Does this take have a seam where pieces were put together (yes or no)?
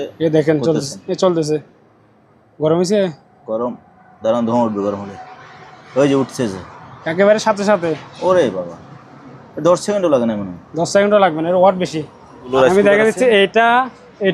yes